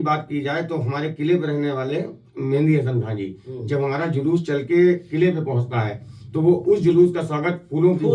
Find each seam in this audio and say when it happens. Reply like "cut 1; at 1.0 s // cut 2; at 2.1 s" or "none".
none